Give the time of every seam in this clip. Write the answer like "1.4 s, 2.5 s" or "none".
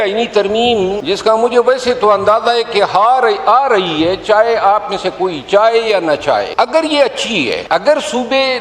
1.0 s, 6.5 s, 7.6 s